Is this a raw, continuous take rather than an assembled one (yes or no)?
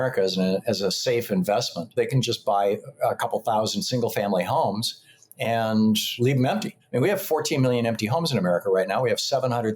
no